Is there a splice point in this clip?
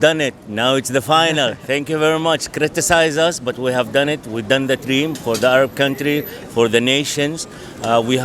no; 0 cuts

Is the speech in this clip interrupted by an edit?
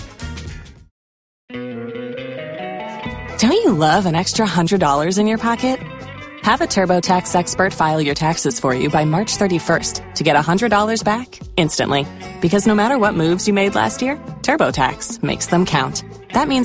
yes; 1 cut; at 1.5 s

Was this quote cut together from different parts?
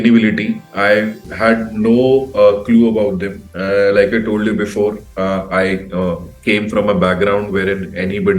no; 0 cuts

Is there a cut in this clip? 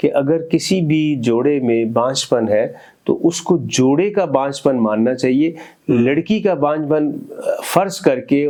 no; 0 cuts

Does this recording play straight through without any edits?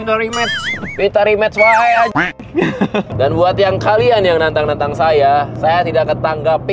no; 1 cut; at 3.1 s

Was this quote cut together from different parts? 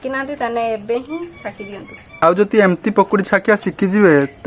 no; 0 cuts

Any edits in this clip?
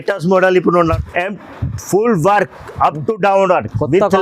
yes; 1 cut; at 1.0 s

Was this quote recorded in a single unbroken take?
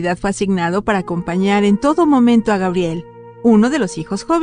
yes; 0 cuts

